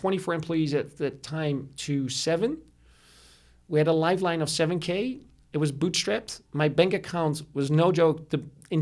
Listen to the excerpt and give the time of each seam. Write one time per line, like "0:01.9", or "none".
none